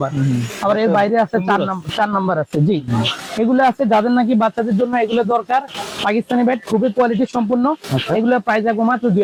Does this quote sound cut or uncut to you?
uncut